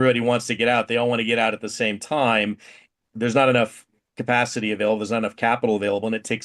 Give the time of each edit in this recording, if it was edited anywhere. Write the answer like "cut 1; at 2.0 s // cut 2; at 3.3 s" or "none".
cut 1; at 2.9 s